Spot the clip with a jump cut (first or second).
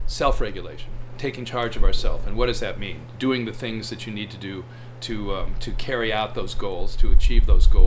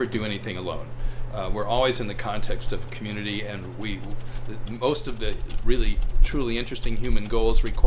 first